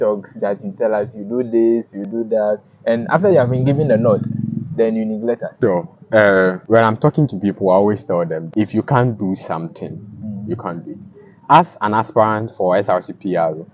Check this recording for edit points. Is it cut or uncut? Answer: cut